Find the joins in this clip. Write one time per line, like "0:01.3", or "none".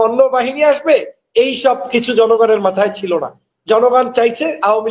none